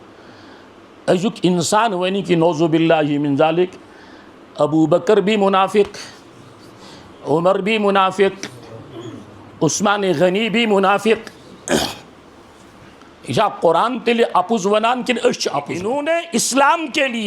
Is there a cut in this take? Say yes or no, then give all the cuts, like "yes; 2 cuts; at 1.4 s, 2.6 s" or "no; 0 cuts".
yes; 1 cut; at 15.8 s